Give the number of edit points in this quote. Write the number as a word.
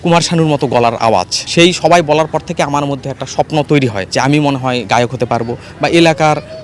one